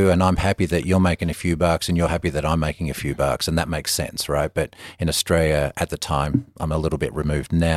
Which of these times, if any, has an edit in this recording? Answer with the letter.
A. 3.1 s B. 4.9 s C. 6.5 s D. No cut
D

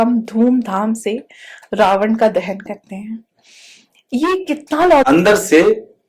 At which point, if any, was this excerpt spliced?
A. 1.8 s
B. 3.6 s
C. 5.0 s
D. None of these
C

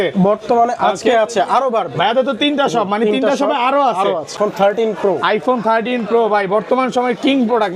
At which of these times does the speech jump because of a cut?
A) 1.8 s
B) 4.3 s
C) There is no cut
B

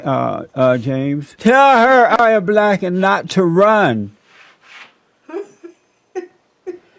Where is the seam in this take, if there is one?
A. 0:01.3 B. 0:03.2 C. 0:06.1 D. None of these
A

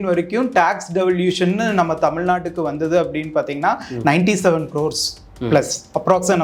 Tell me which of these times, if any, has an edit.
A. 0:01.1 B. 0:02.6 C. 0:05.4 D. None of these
D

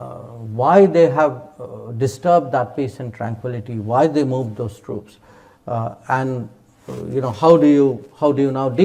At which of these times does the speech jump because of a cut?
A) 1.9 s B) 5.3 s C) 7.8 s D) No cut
D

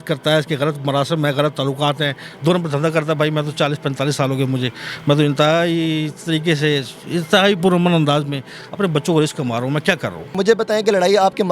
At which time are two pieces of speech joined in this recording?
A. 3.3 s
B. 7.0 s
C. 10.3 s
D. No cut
C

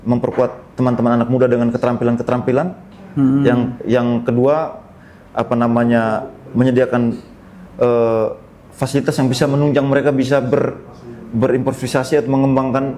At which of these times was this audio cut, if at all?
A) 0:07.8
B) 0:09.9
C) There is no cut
C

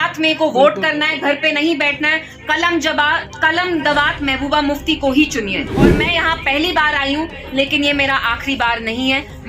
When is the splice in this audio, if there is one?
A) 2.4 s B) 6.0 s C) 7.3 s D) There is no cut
B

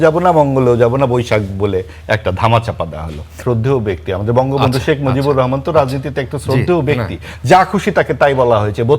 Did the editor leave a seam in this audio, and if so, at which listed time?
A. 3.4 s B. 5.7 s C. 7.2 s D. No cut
A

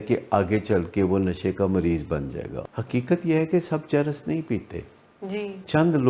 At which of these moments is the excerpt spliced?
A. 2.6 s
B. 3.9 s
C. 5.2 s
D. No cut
A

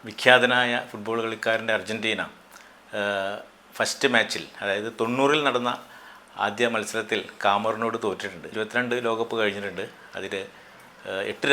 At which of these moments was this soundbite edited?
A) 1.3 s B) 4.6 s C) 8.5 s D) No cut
C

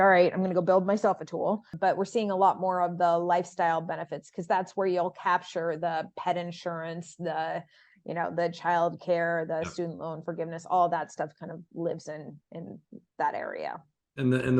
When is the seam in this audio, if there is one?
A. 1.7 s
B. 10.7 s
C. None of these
A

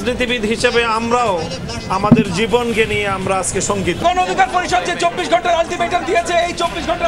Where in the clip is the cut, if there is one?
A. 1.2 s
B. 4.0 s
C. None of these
B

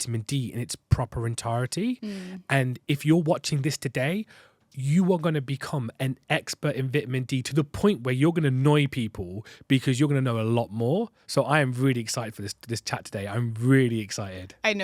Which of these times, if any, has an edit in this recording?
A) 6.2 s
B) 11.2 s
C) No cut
C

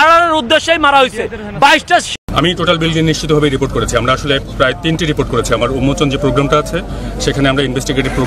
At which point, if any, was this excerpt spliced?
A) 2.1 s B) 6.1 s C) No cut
A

